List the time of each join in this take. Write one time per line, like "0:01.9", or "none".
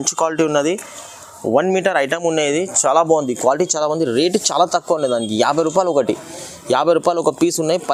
none